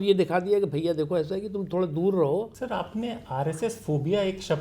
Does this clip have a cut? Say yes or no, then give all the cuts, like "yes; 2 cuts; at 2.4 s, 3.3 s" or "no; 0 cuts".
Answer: yes; 1 cut; at 2.6 s